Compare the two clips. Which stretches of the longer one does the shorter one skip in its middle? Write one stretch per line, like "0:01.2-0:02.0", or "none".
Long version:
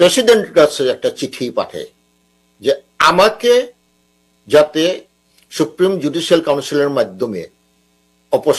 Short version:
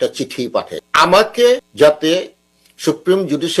0:01.9-0:02.9
0:03.7-0:04.4